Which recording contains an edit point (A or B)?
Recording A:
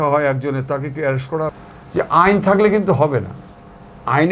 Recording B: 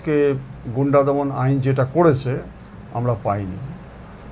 A